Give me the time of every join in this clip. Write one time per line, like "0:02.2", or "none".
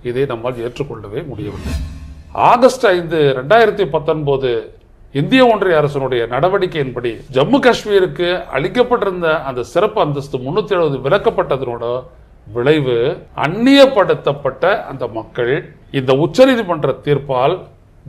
0:01.7
0:07.2
0:13.3
0:15.8